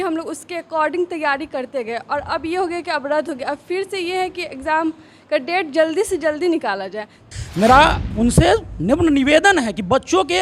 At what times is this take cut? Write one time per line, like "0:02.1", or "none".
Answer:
0:07.2